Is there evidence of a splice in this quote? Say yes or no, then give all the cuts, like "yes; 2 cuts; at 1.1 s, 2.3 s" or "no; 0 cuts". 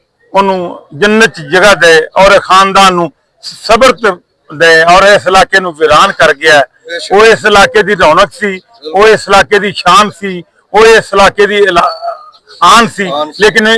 no; 0 cuts